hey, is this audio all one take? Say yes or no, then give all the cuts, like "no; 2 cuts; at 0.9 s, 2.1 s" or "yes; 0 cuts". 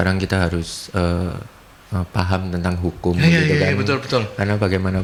yes; 0 cuts